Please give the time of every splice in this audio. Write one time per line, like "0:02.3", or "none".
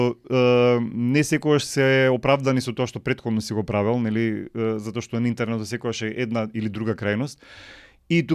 none